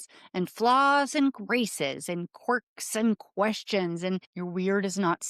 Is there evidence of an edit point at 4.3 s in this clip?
yes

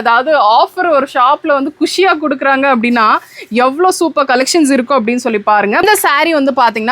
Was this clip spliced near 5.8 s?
yes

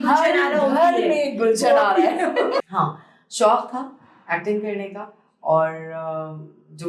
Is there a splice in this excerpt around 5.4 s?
no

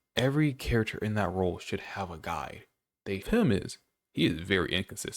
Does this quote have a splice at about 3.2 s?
yes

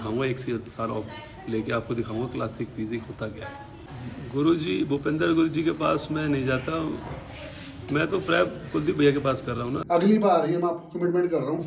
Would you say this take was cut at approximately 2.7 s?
no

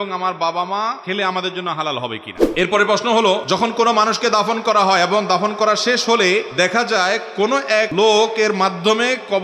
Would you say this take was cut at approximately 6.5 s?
yes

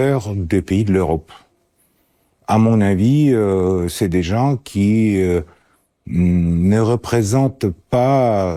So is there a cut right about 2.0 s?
no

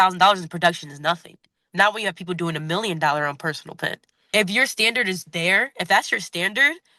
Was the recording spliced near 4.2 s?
yes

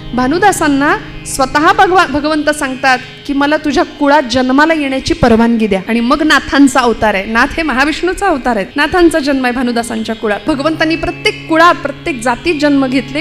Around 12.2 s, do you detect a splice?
no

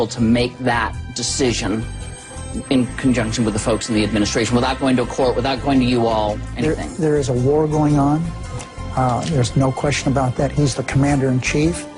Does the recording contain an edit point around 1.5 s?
yes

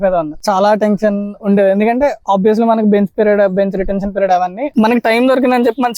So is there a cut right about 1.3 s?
no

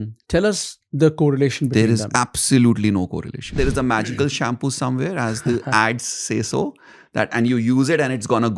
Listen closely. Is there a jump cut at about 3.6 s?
yes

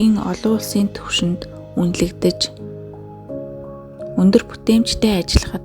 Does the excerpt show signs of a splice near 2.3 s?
yes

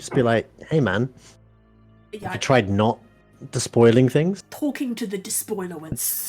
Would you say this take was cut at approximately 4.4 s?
yes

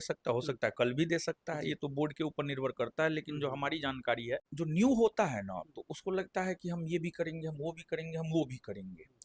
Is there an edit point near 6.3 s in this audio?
no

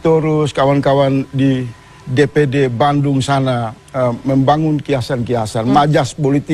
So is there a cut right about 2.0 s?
no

